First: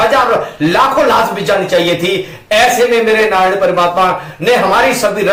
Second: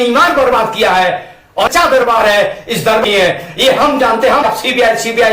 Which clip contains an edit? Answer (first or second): second